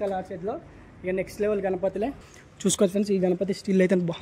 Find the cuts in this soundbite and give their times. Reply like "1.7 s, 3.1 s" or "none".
2.2 s